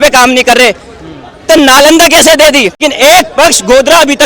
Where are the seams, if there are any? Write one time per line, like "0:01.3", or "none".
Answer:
0:02.9

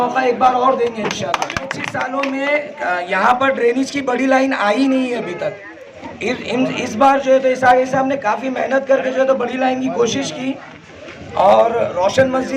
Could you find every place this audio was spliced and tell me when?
0:01.6

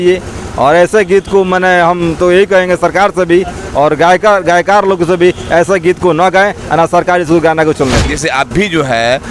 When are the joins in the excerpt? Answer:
0:08.1

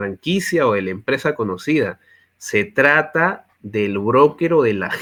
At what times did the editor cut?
none

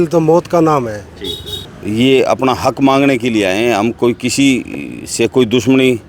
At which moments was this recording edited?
0:01.7

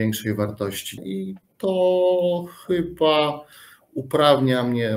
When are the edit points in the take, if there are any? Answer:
0:01.0

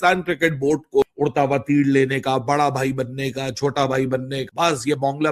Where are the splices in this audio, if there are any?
0:01.0
0:04.5

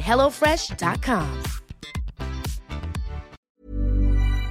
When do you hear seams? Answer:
0:03.5

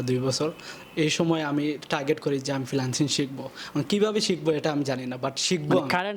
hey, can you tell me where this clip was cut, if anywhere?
none

